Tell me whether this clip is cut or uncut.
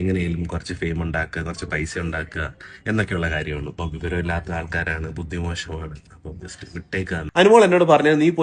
cut